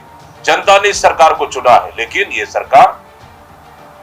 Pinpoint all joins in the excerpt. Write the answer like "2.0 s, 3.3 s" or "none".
none

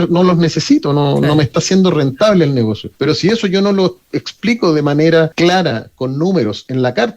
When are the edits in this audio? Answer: 2.9 s, 5.3 s

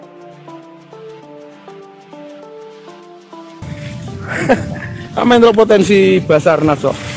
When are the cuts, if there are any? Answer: 3.6 s

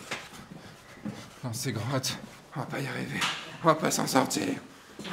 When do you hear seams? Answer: 2.4 s

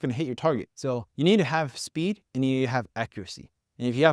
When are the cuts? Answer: 1.0 s, 2.2 s

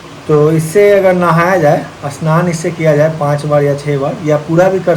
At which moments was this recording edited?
none

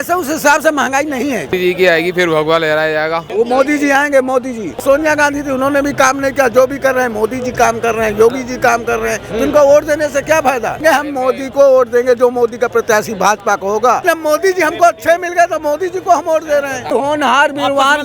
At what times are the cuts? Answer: 1.5 s, 3.2 s, 4.8 s, 10.8 s, 14.0 s, 16.9 s

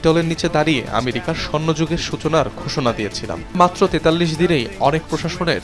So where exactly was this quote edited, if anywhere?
3.5 s

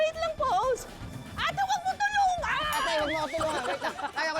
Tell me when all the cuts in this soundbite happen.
1.0 s

